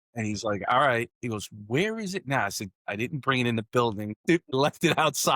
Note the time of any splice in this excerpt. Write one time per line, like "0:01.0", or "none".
0:04.2